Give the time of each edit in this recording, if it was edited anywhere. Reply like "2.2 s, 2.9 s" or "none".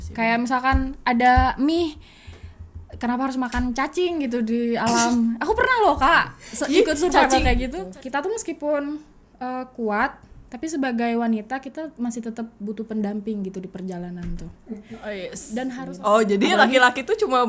7.8 s, 15.8 s